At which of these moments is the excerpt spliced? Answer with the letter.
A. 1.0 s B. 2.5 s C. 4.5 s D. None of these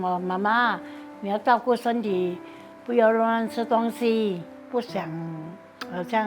C